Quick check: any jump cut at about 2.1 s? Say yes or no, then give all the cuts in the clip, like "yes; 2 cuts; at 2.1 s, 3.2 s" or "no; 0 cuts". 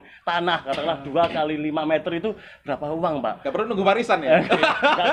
no; 0 cuts